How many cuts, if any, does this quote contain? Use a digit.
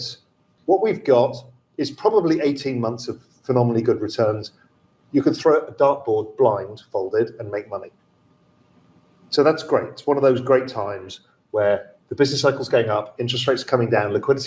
0